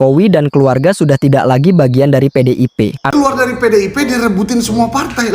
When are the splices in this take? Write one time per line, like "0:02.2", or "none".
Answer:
0:03.1